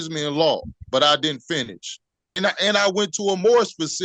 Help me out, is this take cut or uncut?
cut